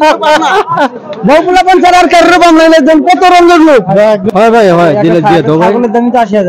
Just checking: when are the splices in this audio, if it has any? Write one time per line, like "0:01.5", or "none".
0:04.2